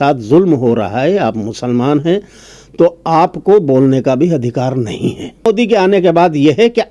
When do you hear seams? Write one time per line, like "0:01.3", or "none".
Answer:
0:05.5